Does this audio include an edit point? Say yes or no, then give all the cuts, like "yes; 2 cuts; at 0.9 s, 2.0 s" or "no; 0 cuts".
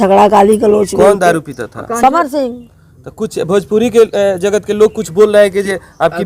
no; 0 cuts